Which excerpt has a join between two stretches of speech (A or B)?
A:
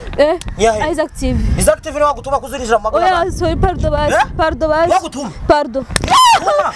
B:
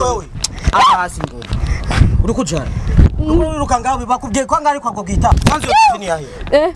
B